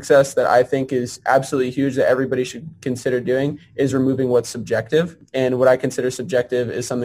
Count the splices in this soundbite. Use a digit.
1